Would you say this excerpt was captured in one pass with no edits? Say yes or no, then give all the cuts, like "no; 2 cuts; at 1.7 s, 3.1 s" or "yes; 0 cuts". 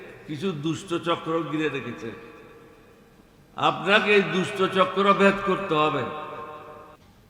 yes; 0 cuts